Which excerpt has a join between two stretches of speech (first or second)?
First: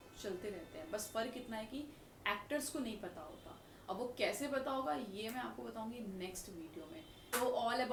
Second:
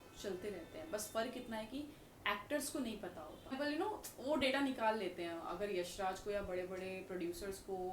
second